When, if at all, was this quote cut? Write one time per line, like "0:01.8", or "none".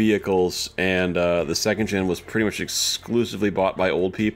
none